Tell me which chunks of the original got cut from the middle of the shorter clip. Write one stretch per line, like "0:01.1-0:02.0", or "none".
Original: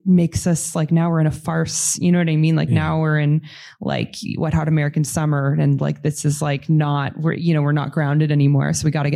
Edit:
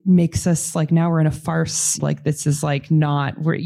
0:02.0-0:05.8

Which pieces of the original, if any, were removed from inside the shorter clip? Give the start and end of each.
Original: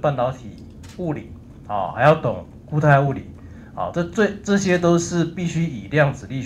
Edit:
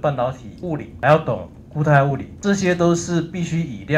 0:01.0-0:01.9
0:03.3-0:04.4

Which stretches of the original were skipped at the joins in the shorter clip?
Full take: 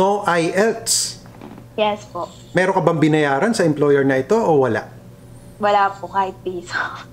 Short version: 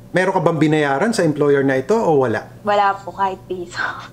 0:04.9-0:05.5

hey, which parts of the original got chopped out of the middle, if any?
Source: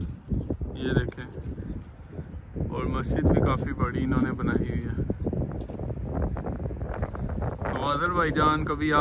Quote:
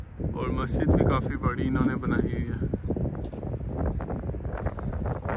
none

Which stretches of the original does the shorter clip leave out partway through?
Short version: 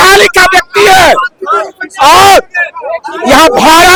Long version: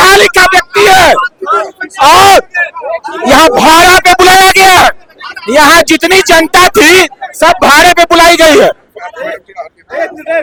none

